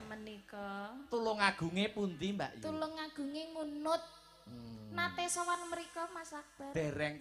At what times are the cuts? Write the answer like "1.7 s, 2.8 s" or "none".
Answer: none

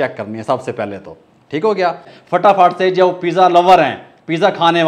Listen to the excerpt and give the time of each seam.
2.1 s

